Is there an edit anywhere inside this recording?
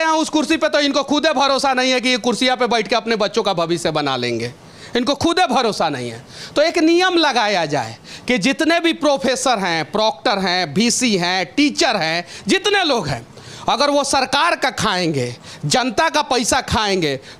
no; 0 cuts

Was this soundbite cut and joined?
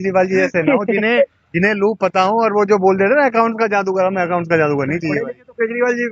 no; 0 cuts

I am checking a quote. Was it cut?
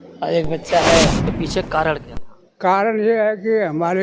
yes; 1 cut; at 1.3 s

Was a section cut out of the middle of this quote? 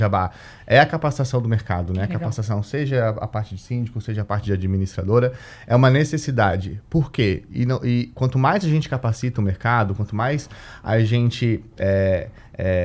no; 0 cuts

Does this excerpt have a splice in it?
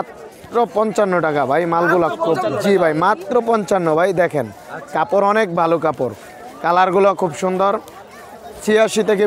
no; 0 cuts

